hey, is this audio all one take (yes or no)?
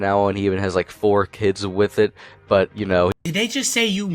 no